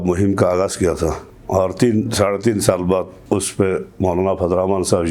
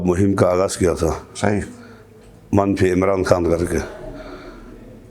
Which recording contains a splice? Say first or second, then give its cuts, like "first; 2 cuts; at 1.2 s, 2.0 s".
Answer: first; 2 cuts; at 1.3 s, 3.2 s